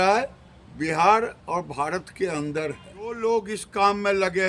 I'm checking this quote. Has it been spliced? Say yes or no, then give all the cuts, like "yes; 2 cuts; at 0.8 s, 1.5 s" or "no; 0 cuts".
yes; 1 cut; at 3.2 s